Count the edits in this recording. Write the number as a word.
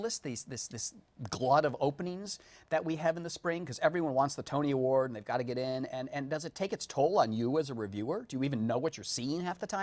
zero